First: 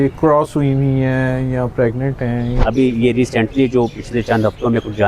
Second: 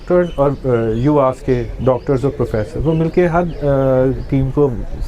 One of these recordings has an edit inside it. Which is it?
first; 1 cut; at 2.6 s

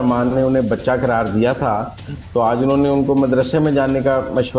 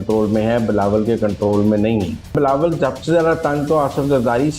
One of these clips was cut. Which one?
second; 1 cut; at 2.3 s

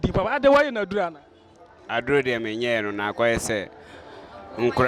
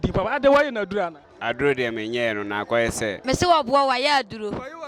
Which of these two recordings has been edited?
second; 2 cuts; at 1.3 s, 3.1 s

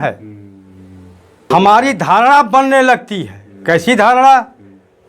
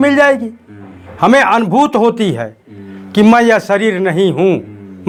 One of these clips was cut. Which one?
first; 1 cut; at 1.5 s

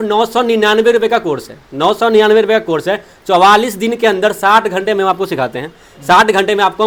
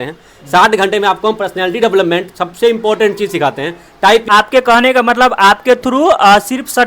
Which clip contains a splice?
second; 1 cut; at 4.3 s

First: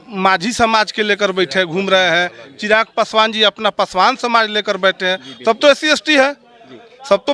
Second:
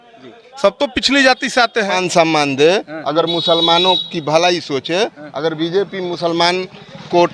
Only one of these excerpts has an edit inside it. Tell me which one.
second; 1 cut; at 1.9 s

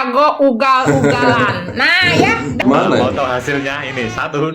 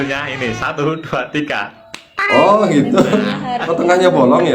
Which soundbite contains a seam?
first; 1 cut; at 2.6 s

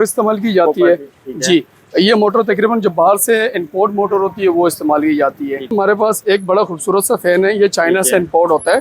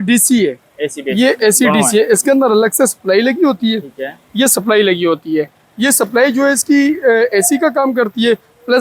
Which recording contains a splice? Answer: first; 1 cut; at 5.7 s

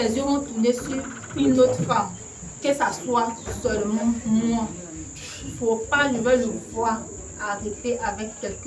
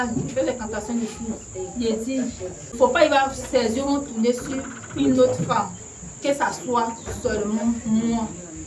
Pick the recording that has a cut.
second; 1 cut; at 2.6 s

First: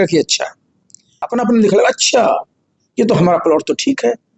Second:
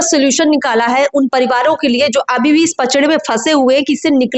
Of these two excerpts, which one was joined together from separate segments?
first; 1 cut; at 1.3 s

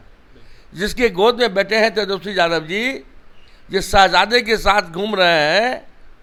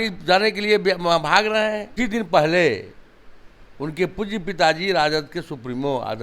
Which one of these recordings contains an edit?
second; 1 cut; at 1.9 s

